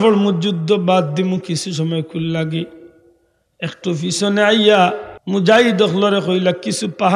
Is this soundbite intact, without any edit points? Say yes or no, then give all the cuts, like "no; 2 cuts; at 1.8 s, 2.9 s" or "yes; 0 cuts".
no; 1 cut; at 5.1 s